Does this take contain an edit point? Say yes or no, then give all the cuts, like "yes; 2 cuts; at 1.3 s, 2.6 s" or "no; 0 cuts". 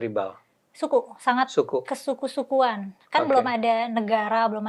no; 0 cuts